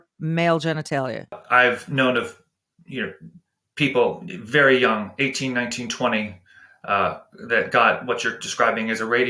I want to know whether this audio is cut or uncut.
cut